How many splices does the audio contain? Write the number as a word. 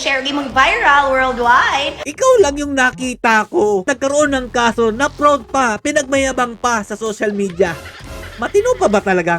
two